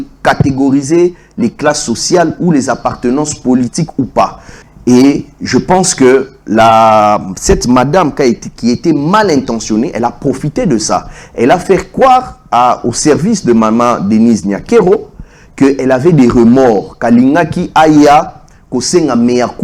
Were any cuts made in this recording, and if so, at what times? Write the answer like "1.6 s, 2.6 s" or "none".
none